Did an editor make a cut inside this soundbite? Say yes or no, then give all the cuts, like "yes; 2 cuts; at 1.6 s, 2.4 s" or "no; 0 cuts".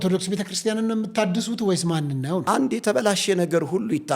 no; 0 cuts